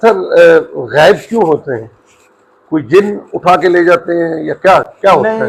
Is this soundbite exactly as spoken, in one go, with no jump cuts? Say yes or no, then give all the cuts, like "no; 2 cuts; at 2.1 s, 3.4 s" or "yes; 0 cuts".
yes; 0 cuts